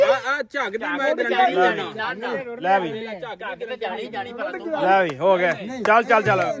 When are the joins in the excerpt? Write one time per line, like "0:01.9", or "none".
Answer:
none